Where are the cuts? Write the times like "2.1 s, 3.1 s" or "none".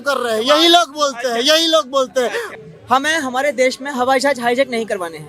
2.4 s